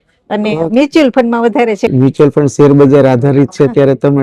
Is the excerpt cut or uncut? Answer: cut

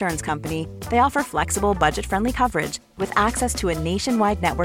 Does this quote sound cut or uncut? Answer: uncut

